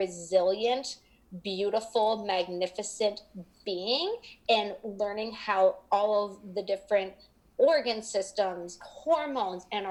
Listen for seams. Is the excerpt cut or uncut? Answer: uncut